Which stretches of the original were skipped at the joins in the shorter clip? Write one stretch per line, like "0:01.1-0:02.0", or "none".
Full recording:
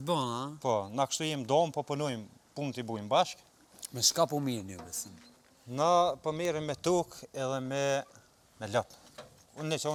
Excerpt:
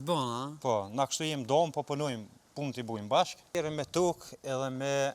0:03.5-0:06.4